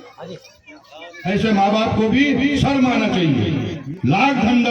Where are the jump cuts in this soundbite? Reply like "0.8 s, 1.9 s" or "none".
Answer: 3.7 s